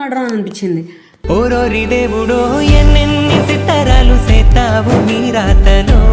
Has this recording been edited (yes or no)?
no